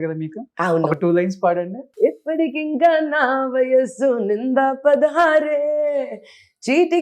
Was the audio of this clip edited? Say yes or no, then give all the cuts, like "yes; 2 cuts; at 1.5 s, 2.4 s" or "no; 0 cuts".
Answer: yes; 1 cut; at 1.8 s